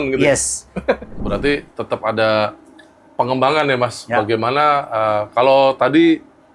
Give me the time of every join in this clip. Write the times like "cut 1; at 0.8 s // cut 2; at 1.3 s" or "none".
cut 1; at 1.1 s